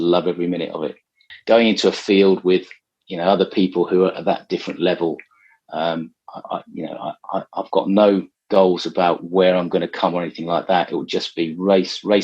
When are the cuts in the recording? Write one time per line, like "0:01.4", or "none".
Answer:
0:01.3